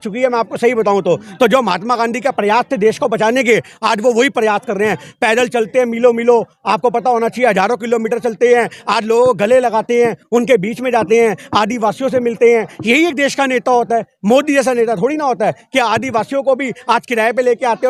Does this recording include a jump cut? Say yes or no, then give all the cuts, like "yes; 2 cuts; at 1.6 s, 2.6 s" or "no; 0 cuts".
no; 0 cuts